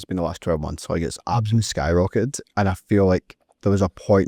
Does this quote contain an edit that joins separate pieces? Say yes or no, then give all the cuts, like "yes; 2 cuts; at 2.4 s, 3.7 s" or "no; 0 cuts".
no; 0 cuts